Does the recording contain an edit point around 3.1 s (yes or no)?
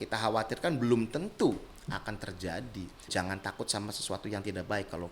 yes